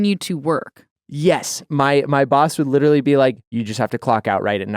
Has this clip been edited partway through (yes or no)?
yes